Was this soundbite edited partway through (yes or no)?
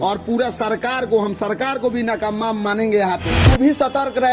yes